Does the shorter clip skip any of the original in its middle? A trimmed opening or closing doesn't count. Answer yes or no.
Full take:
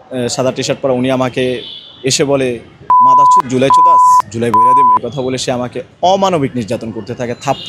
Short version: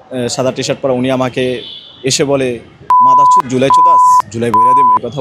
no